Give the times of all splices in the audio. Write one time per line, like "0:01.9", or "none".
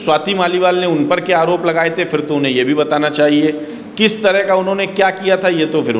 none